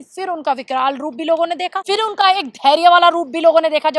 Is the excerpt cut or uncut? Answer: cut